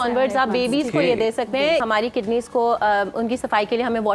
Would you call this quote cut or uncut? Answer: cut